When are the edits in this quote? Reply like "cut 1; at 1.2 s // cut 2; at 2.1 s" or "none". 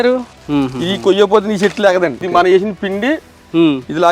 cut 1; at 2.2 s